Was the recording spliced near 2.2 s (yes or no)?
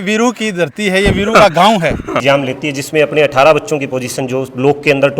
yes